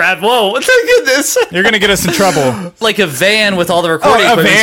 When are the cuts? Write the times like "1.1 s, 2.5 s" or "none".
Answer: 2.8 s